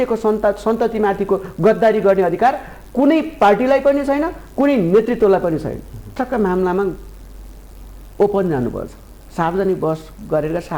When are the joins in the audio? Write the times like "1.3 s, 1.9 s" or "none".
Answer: 6.1 s